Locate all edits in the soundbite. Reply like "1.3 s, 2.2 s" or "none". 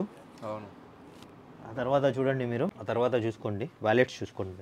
2.8 s